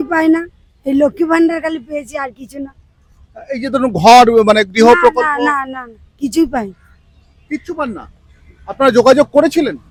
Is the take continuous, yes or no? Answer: yes